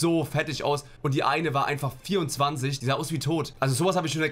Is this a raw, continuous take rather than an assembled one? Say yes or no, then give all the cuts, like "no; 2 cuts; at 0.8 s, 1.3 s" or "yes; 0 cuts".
no; 2 cuts; at 0.9 s, 2.9 s